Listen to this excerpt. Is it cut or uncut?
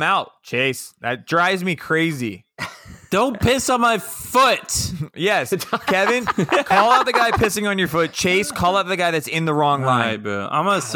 uncut